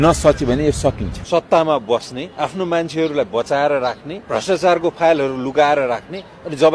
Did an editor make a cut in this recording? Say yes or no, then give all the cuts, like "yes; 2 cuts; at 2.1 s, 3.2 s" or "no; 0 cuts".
yes; 3 cuts; at 1.1 s, 2.2 s, 4.1 s